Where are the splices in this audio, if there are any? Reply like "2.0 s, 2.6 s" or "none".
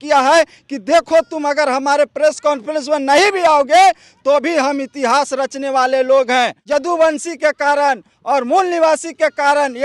none